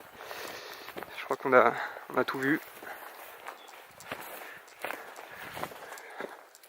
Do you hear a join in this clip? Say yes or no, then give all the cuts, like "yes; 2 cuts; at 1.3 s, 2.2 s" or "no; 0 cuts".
yes; 1 cut; at 1.5 s